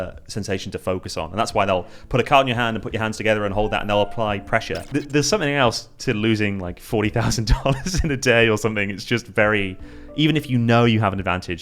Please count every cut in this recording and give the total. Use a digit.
1